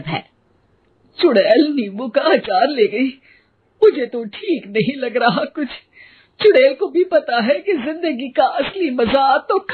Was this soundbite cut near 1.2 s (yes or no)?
no